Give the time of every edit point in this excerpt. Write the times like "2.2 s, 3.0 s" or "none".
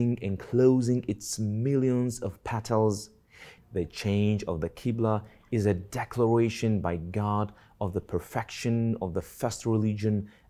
3.6 s